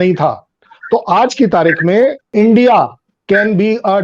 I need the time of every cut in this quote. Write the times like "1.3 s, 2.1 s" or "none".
2.3 s

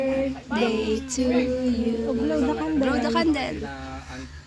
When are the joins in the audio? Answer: none

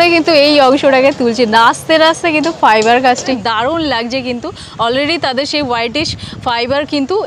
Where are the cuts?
3.3 s

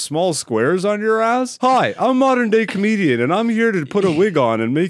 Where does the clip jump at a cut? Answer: 1.5 s

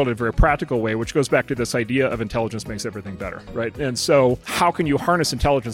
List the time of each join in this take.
3.7 s, 4.5 s

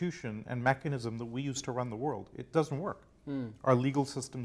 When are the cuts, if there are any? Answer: none

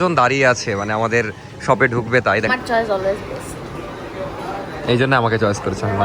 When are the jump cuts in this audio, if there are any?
2.5 s

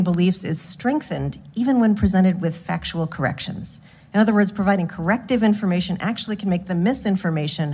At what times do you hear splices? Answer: none

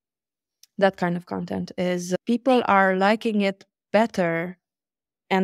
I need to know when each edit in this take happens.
none

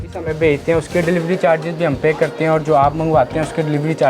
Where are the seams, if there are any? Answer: none

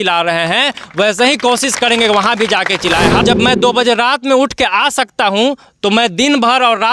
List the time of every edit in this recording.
3.2 s

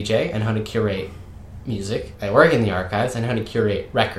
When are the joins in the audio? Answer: 2.1 s

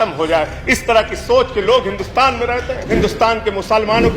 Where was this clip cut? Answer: 2.8 s

